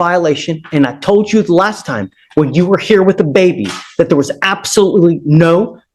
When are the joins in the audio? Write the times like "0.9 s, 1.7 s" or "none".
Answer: none